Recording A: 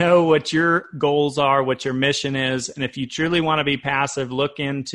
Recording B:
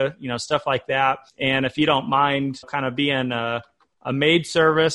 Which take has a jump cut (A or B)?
B